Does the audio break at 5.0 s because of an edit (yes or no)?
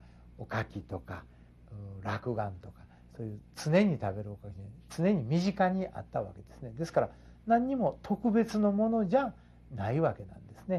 yes